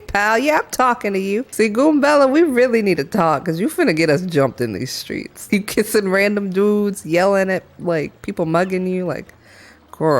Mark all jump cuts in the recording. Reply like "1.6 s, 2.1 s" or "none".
1.5 s, 5.4 s